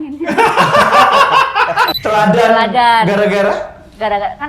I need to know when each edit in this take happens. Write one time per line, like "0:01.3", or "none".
0:01.9